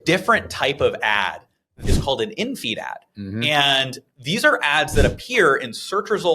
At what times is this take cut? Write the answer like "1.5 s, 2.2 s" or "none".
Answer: 1.8 s

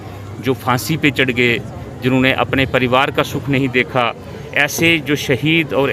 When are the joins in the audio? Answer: none

